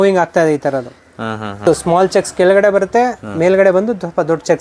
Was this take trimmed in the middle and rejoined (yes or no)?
yes